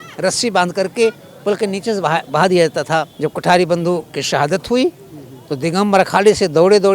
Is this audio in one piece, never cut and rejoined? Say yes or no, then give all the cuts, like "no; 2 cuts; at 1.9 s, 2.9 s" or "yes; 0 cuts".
no; 1 cut; at 3.1 s